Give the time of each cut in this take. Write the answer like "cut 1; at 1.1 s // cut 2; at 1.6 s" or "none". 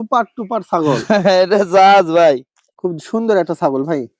cut 1; at 2.7 s